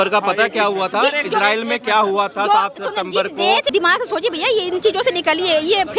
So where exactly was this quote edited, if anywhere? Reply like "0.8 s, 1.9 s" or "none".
3.7 s